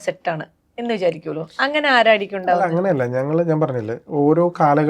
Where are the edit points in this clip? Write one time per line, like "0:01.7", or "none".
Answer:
none